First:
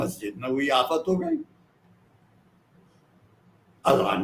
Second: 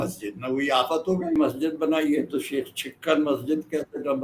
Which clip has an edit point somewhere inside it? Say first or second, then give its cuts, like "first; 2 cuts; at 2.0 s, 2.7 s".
second; 1 cut; at 1.4 s